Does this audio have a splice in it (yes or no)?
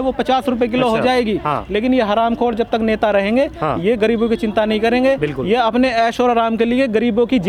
no